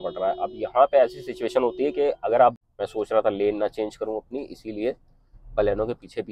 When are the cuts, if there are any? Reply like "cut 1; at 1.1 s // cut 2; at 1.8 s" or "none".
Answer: cut 1; at 2.6 s